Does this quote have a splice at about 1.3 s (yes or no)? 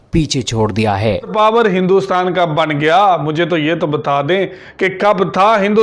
yes